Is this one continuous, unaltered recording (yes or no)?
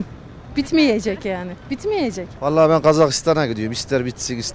no